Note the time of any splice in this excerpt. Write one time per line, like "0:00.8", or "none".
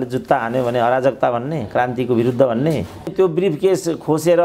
0:03.1